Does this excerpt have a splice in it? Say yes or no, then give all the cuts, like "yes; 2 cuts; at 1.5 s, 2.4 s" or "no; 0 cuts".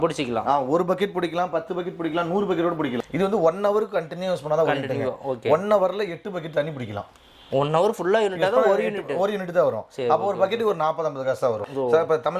yes; 2 cuts; at 3.0 s, 11.6 s